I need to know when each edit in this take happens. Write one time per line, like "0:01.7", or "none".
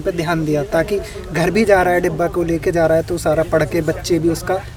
none